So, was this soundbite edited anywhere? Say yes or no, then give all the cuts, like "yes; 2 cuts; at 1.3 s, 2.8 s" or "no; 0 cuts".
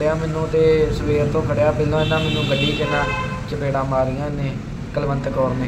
no; 0 cuts